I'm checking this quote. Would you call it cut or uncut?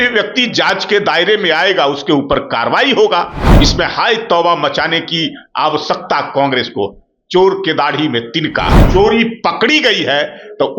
cut